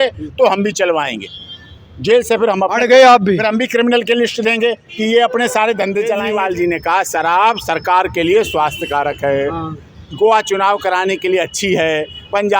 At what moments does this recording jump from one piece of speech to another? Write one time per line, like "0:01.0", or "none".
0:06.2